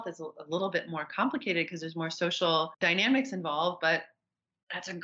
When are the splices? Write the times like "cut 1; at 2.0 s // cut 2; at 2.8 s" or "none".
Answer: cut 1; at 2.8 s